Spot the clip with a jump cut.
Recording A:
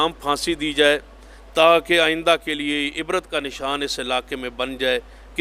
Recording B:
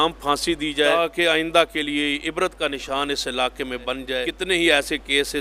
B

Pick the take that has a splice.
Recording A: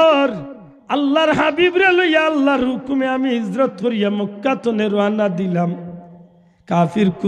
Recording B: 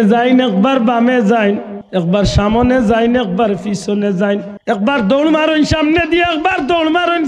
B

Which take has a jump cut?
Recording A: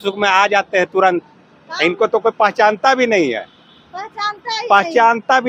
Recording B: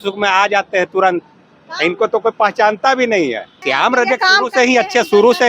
B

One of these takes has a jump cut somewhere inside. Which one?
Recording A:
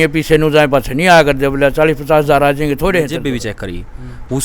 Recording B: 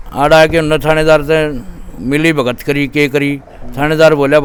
A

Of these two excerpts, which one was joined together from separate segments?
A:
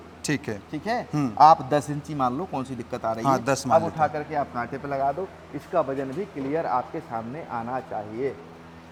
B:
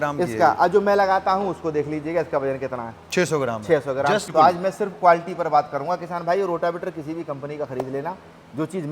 B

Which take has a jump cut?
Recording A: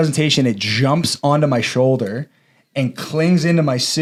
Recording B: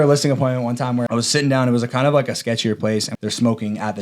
B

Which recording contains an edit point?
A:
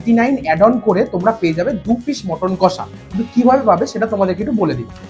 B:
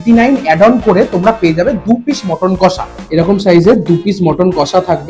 B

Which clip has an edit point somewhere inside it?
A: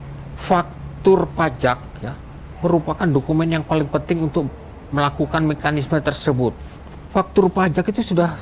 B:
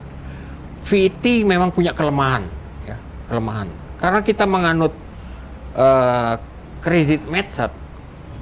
A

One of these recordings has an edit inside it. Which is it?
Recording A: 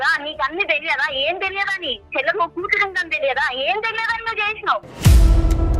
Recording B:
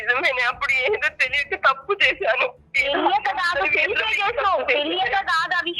A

